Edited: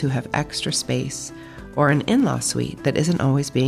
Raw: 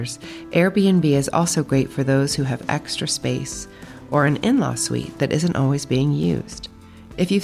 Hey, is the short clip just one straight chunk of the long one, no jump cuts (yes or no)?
yes